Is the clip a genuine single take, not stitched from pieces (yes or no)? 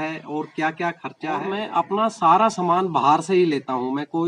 no